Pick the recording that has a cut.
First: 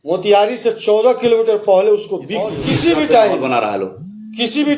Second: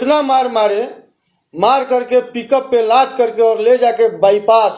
first; 1 cut; at 2.6 s

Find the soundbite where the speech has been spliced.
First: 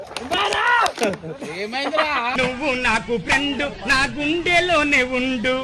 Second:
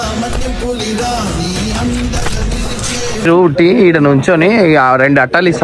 second; 1 cut; at 3.3 s

